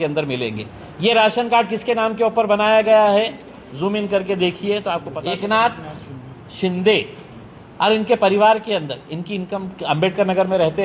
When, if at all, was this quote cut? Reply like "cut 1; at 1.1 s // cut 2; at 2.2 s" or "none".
cut 1; at 5.1 s